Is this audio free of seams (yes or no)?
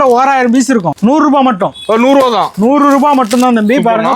no